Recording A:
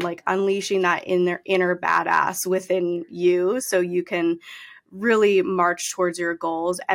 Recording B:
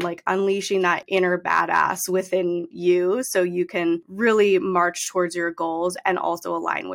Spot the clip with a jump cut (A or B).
B